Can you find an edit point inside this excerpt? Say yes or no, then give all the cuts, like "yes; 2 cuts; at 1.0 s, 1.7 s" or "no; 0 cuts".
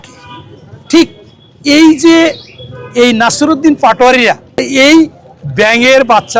yes; 1 cut; at 4.7 s